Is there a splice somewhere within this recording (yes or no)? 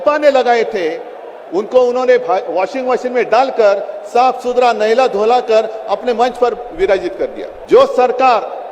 yes